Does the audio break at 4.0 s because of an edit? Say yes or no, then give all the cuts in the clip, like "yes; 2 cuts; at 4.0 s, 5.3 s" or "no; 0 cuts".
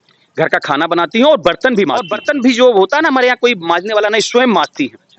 no; 1 cut; at 2.1 s